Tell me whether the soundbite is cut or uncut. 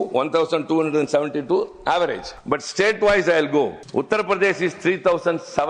cut